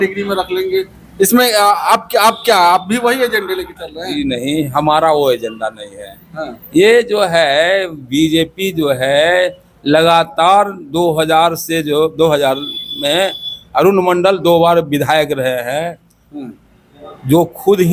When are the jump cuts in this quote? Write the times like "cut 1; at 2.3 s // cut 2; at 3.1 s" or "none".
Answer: none